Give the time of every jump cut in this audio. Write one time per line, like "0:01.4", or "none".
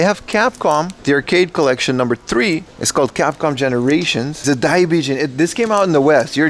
0:00.9
0:04.4